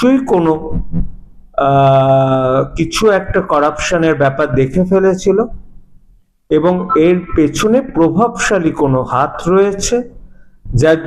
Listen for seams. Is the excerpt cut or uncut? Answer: uncut